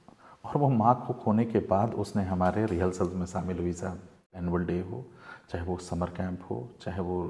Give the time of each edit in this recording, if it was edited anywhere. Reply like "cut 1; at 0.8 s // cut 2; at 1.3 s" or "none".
cut 1; at 4.4 s